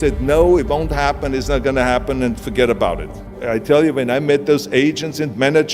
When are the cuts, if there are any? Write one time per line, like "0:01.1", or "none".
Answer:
0:03.4